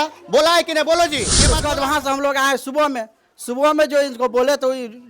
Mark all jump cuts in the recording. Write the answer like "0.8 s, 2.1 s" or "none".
1.6 s